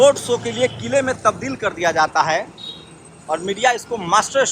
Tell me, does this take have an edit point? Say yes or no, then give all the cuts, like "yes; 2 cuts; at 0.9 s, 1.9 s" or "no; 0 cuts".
no; 0 cuts